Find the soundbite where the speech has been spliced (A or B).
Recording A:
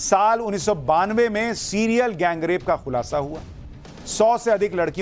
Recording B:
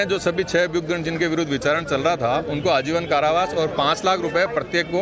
B